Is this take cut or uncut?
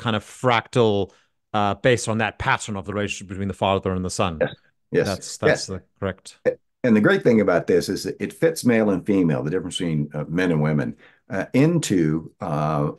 uncut